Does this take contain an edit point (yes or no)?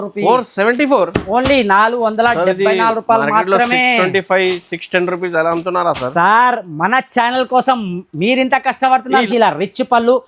yes